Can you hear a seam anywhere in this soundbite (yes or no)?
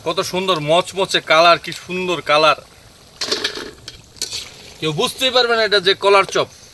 no